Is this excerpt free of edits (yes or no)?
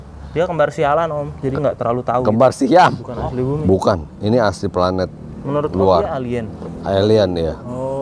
no